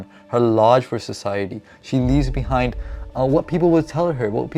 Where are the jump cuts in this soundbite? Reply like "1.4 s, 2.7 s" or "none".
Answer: none